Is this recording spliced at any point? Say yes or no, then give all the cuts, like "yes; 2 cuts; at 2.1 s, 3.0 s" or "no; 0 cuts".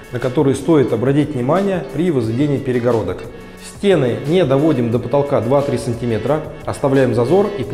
no; 0 cuts